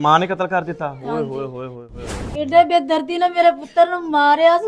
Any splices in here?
yes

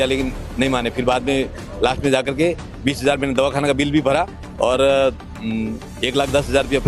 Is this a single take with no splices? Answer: yes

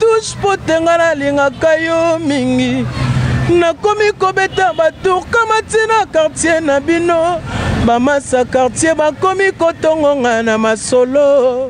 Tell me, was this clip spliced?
no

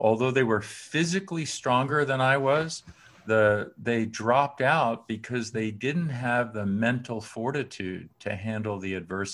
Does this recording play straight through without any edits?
yes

